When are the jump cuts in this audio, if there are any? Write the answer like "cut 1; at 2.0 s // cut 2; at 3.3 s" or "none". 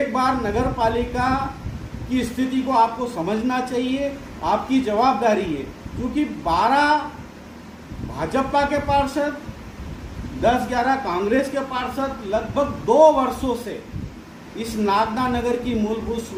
none